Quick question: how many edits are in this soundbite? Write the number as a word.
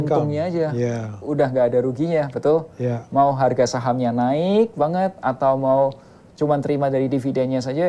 zero